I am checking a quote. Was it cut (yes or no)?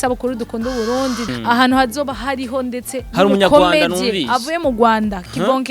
yes